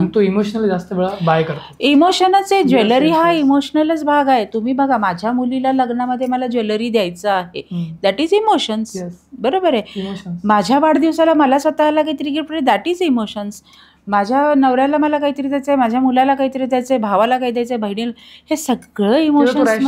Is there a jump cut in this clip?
no; 0 cuts

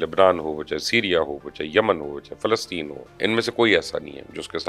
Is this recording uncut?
yes; 0 cuts

